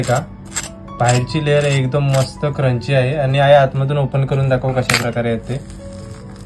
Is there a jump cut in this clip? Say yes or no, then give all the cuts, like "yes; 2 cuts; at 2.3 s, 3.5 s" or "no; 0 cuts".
no; 0 cuts